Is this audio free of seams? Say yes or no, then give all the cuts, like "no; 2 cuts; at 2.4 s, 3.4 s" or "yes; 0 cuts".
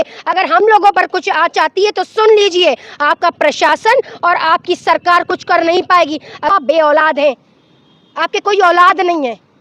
no; 1 cut; at 6.5 s